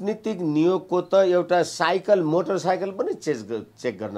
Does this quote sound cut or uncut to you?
uncut